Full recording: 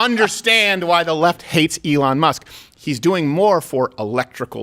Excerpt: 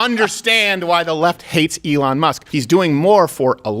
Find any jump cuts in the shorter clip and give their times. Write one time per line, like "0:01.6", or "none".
0:02.5

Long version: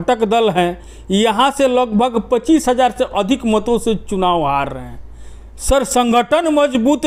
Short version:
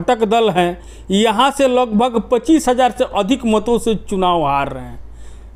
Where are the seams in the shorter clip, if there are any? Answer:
none

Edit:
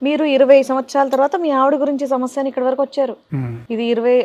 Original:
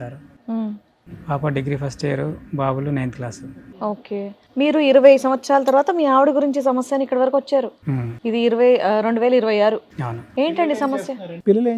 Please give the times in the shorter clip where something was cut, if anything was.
none

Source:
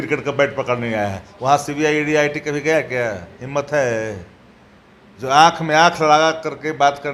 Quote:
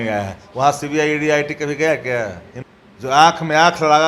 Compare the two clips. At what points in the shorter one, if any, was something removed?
0:02.5

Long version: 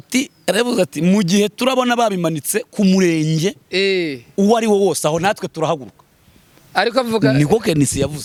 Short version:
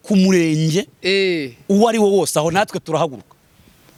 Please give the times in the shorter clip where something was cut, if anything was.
none

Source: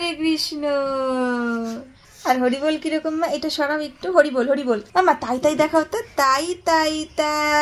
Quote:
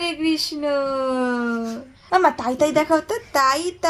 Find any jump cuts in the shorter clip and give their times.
0:02.0

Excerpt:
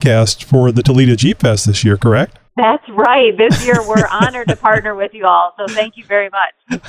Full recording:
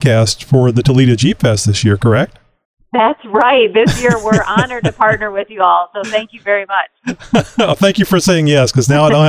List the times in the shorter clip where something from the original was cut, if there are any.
0:02.4

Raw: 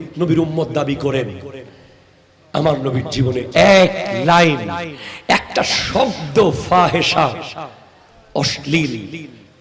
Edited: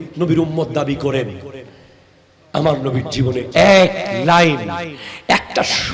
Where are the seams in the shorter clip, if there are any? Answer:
none

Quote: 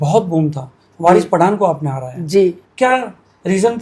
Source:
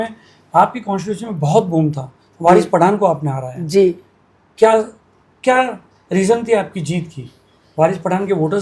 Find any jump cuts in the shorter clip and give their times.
0:02.6

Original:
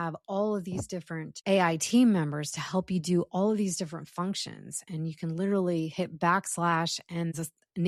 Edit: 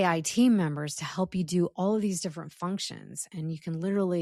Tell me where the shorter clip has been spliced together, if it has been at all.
none

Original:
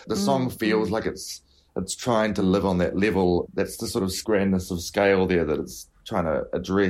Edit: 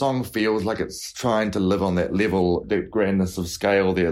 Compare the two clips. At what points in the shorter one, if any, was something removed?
0:01.0
0:02.8

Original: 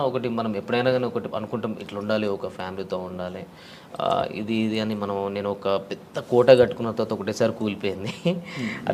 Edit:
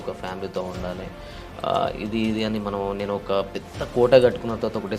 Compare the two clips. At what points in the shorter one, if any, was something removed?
none

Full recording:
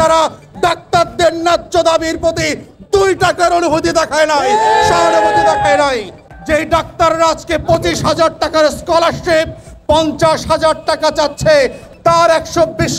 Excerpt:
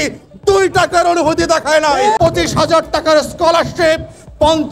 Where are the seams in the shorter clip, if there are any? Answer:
0:02.2

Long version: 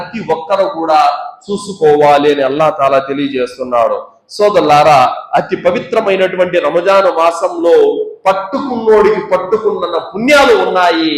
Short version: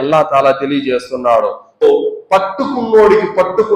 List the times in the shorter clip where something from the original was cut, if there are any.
0:01.8

